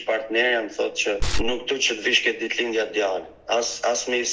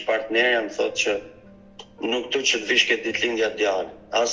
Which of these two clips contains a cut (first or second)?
first